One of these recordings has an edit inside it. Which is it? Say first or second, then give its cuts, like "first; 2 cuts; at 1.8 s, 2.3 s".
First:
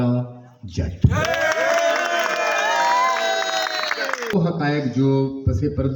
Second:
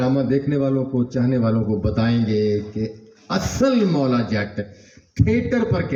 first; 1 cut; at 4.3 s